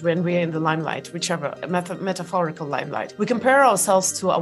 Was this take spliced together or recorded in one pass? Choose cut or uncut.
uncut